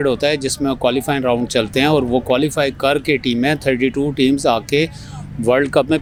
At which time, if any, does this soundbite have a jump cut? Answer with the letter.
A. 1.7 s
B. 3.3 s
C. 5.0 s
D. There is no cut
D